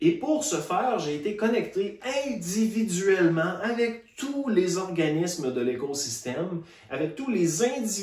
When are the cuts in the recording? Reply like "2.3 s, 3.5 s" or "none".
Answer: none